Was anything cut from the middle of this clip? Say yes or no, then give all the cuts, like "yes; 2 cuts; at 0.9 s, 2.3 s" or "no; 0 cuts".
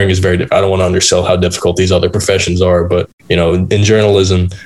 yes; 1 cut; at 3.2 s